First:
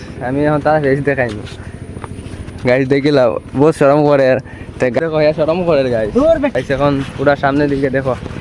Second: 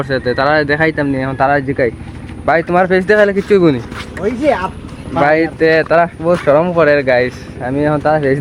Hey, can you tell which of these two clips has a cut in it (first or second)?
first